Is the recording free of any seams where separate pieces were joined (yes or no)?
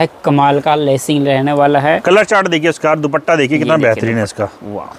yes